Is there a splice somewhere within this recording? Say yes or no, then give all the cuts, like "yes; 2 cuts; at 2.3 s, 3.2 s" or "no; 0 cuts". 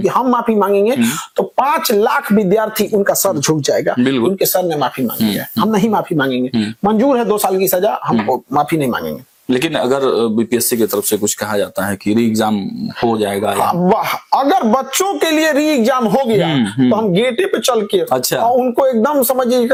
no; 0 cuts